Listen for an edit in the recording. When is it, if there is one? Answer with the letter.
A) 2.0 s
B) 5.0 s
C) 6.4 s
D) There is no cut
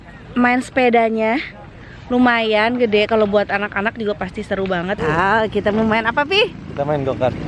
B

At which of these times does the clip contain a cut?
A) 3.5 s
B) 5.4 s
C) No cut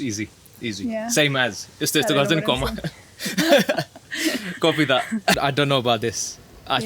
B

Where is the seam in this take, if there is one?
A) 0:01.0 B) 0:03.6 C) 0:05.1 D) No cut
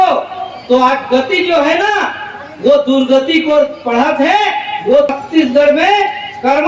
C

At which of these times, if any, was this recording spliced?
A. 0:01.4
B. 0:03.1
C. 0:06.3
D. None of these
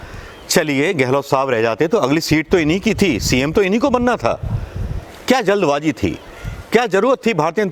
D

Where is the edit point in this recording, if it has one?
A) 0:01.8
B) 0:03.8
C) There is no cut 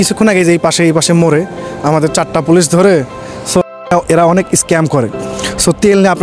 B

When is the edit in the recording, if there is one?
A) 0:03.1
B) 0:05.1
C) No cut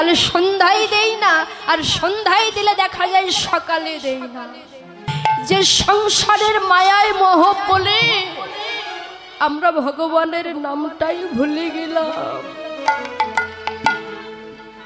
B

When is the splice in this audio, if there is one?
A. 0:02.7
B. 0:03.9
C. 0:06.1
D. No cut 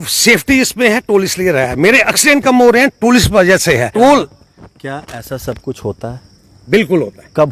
B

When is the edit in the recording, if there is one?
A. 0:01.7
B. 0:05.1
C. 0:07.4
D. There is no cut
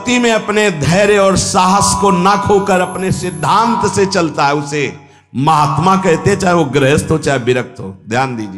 D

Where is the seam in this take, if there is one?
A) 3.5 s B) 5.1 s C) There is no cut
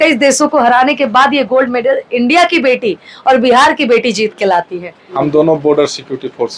B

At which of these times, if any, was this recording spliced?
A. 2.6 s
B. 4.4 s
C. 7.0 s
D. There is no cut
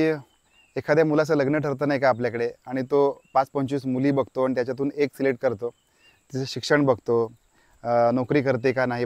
D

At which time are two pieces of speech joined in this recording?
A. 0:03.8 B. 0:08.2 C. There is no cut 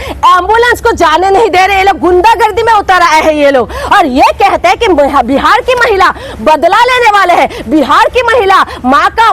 C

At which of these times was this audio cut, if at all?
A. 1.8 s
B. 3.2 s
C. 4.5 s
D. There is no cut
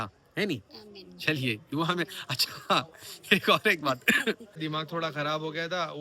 C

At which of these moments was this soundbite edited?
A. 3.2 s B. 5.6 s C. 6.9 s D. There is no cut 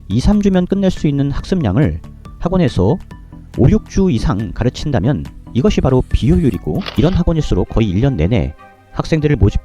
C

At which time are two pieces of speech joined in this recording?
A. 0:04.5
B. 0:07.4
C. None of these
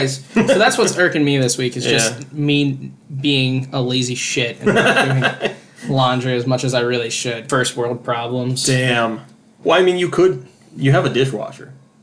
B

